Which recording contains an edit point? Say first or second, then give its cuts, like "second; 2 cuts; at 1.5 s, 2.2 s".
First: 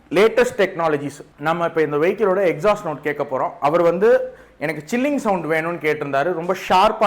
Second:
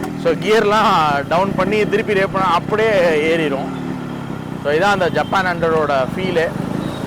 first; 1 cut; at 1.2 s